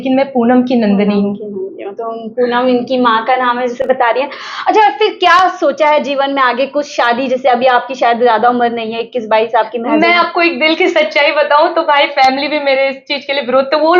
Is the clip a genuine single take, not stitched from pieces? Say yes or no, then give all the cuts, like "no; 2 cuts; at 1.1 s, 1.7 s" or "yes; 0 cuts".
yes; 0 cuts